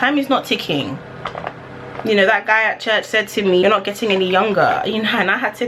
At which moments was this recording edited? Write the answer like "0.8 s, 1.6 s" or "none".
3.6 s